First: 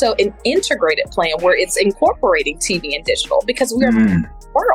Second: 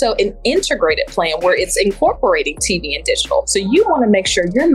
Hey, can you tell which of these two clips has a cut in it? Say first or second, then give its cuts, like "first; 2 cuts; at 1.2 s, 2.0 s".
second; 1 cut; at 3.5 s